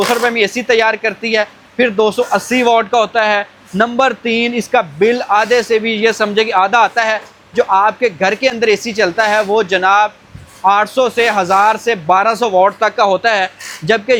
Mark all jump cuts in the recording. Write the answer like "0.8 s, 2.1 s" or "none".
none